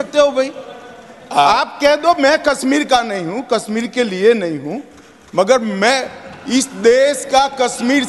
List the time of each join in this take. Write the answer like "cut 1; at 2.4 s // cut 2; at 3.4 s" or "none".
none